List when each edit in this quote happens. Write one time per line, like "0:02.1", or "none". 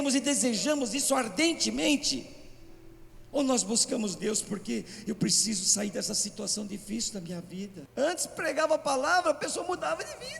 0:07.8